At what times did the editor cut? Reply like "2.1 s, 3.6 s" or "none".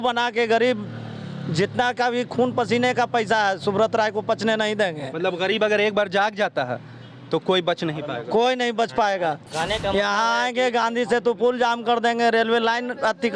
none